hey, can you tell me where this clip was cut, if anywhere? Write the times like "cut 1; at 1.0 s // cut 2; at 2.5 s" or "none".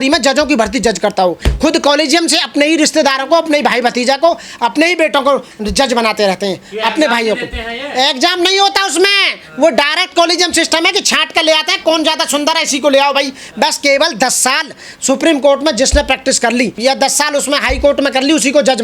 none